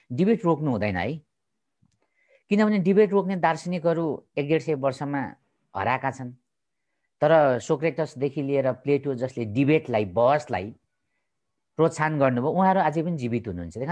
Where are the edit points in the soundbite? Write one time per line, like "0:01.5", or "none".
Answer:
none